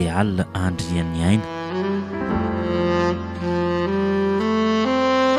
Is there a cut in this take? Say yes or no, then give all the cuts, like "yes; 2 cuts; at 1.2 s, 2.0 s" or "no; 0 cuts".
yes; 1 cut; at 1.6 s